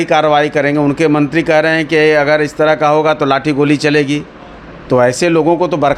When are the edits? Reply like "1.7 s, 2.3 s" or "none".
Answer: none